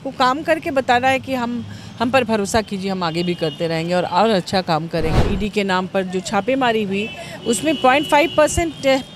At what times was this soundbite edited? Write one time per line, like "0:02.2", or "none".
0:05.3